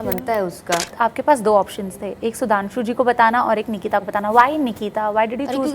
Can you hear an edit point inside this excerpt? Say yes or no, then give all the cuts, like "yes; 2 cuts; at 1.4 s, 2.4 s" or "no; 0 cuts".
yes; 1 cut; at 0.9 s